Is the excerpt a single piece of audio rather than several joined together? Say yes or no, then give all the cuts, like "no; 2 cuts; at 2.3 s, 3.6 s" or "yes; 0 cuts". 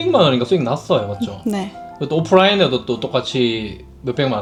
yes; 0 cuts